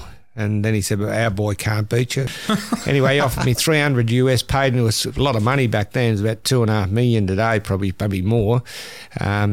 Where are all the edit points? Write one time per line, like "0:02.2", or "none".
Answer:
0:02.3